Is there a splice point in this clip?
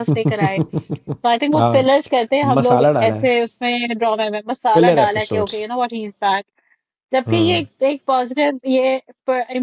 no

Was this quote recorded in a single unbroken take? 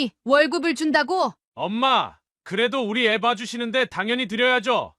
no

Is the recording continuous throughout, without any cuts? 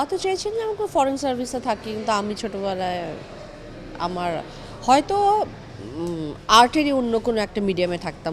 yes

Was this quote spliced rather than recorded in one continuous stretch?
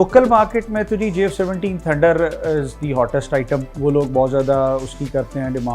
yes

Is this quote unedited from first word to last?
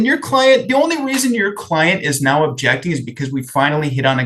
yes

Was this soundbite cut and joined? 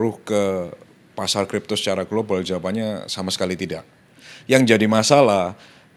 no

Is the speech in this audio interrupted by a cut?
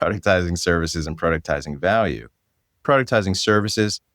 yes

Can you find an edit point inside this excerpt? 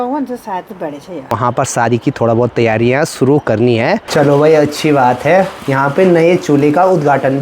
yes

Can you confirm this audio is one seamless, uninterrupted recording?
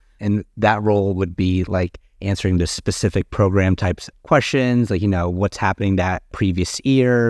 no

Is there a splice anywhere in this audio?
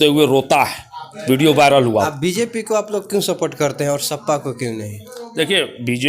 yes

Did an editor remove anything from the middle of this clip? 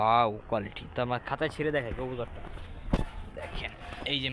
no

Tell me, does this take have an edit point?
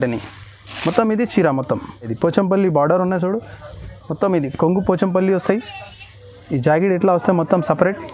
yes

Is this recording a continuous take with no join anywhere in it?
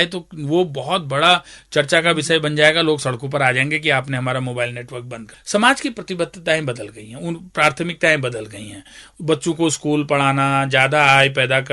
no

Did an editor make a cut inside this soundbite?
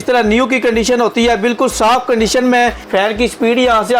yes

